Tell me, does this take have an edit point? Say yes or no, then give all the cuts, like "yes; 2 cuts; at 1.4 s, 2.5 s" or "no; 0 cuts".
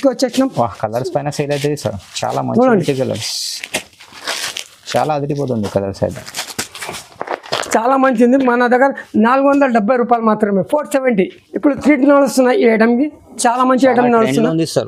no; 0 cuts